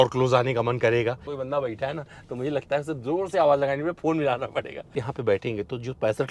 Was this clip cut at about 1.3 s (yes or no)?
yes